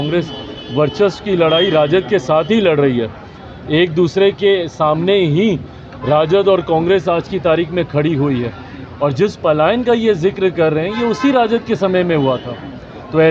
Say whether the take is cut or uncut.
uncut